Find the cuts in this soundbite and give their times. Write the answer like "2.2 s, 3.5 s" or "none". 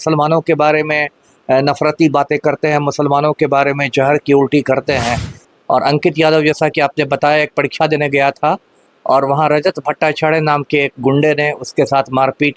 5.5 s